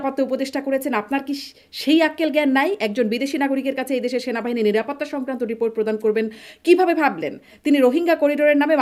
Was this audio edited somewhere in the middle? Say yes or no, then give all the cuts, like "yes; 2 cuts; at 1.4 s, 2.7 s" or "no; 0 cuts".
no; 0 cuts